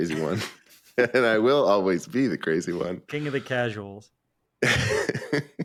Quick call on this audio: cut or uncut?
uncut